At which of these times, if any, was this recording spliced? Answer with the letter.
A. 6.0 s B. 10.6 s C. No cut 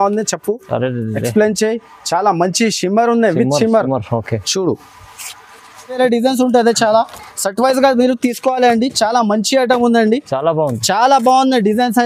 A